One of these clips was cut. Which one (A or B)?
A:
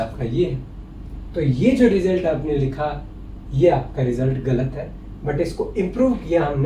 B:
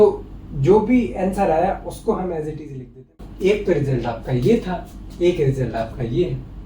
B